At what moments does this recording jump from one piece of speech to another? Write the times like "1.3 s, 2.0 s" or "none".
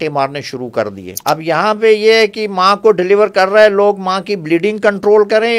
1.1 s